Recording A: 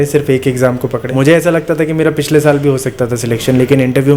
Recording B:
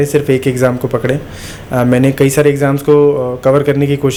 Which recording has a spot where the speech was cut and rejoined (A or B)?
A